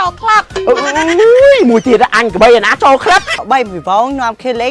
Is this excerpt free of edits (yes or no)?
no